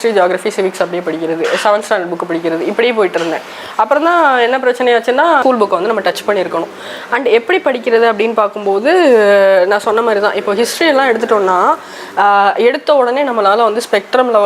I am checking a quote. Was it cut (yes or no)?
yes